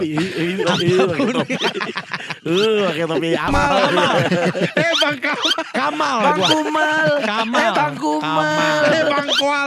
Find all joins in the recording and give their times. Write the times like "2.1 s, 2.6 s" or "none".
3.5 s